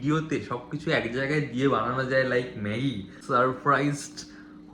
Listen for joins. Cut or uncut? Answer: cut